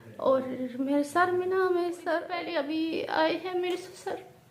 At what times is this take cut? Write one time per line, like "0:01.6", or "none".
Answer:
0:02.4